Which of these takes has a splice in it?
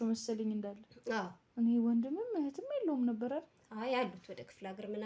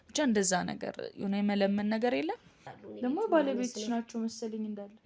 second; 1 cut; at 2.6 s

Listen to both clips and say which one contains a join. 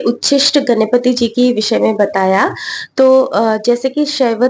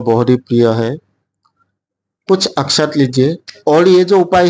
second; 1 cut; at 3.5 s

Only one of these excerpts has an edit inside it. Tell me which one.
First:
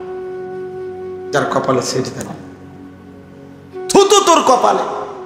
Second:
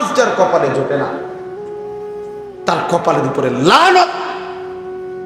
second; 2 cuts; at 1.2 s, 2.6 s

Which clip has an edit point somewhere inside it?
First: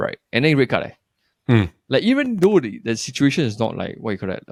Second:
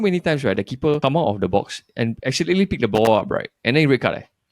second; 1 cut; at 1.0 s

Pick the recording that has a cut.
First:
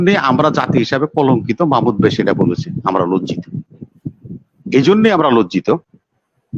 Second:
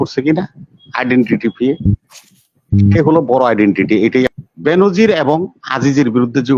second; 1 cut; at 4.3 s

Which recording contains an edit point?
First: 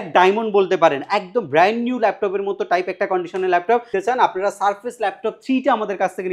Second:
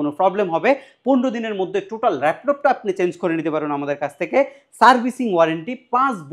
first; 1 cut; at 3.9 s

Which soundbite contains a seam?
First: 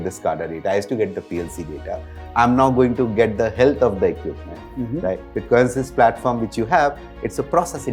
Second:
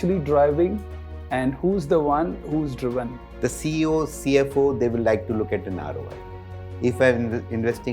second; 1 cut; at 3.2 s

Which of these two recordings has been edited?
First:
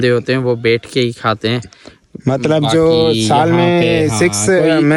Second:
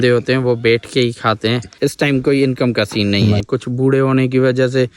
second; 2 cuts; at 1.7 s, 3.4 s

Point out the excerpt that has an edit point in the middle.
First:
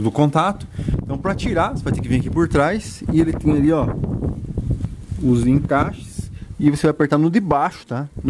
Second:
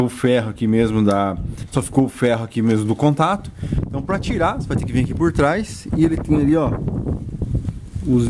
second; 1 cut; at 1.6 s

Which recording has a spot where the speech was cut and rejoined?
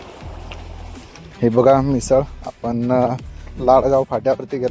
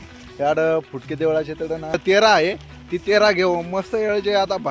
second; 1 cut; at 2.0 s

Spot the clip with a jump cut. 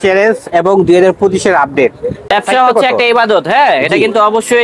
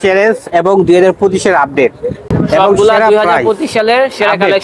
first; 1 cut; at 2.3 s

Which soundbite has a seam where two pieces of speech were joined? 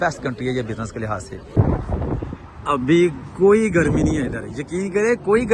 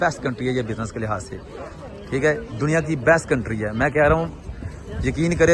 first; 1 cut; at 1.4 s

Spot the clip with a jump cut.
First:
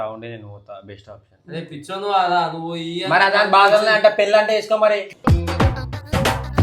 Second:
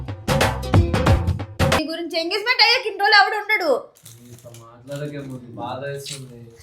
second; 1 cut; at 1.8 s

